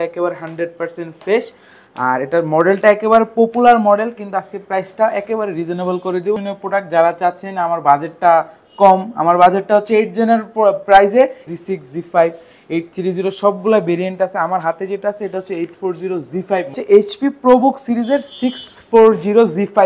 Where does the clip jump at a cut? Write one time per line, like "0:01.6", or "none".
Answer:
0:06.4
0:11.5
0:16.8